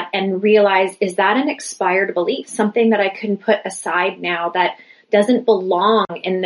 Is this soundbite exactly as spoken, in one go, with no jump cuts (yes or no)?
yes